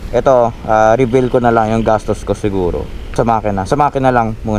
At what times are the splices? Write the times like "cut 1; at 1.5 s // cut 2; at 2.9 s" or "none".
cut 1; at 3.1 s